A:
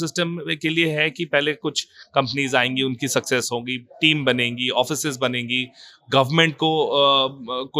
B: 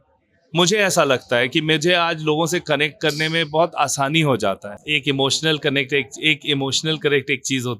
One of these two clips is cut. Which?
B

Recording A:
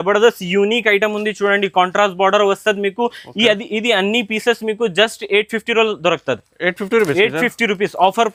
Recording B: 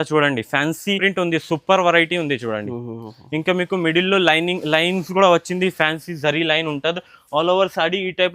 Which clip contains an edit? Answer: B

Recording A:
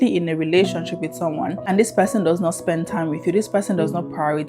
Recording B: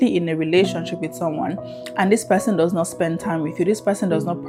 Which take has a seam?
A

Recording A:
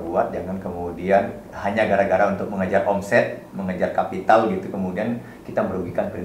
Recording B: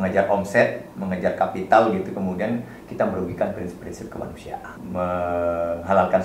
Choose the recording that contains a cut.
B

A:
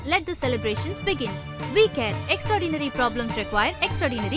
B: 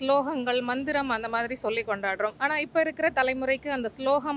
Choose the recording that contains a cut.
B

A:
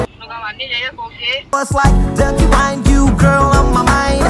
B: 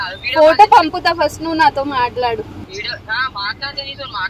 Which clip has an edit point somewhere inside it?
B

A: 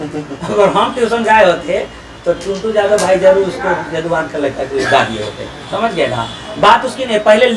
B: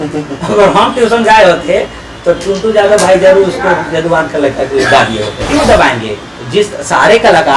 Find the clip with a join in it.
B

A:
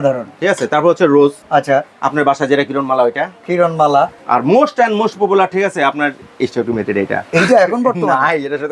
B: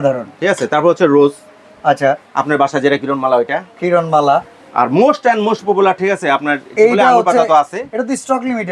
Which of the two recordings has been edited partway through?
A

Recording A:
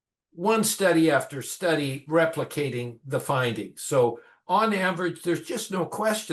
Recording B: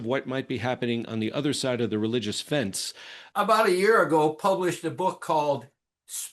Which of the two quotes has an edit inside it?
B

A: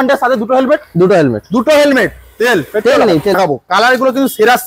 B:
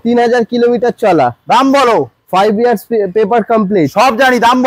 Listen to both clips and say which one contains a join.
A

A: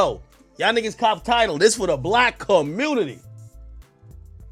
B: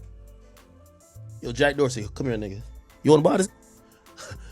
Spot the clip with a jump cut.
B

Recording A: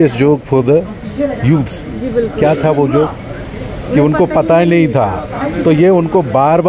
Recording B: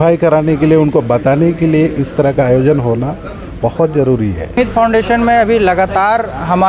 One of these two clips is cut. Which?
B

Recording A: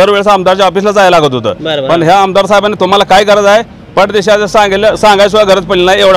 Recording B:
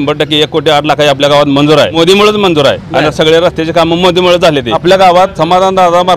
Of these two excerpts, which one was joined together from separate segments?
B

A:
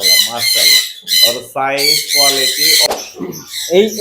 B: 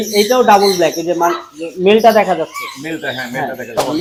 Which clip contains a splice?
A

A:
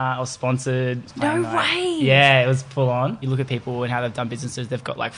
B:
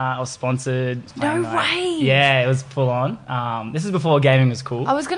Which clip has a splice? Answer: A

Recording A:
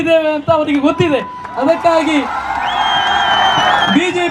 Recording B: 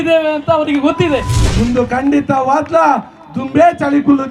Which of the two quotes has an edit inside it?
B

